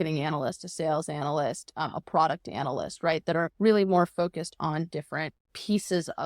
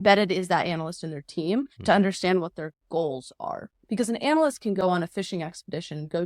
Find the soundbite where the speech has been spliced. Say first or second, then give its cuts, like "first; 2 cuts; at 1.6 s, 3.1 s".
first; 2 cuts; at 3.5 s, 5.5 s